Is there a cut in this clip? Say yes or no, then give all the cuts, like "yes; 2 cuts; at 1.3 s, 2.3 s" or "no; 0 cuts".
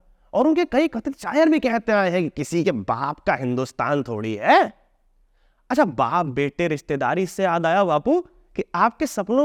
no; 0 cuts